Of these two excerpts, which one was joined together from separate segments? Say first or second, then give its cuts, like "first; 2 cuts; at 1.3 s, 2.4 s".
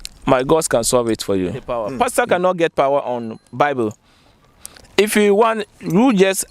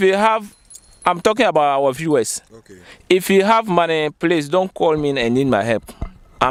first; 1 cut; at 1.8 s